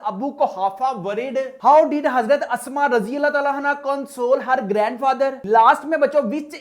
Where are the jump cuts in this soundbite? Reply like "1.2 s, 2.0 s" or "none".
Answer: none